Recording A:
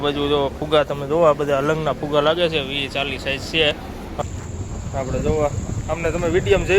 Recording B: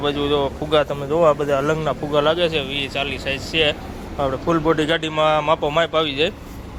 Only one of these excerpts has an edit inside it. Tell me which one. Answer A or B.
A